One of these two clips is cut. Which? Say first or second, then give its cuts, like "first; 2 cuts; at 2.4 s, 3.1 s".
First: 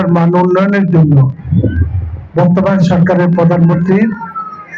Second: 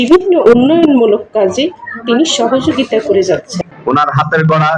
second; 1 cut; at 3.7 s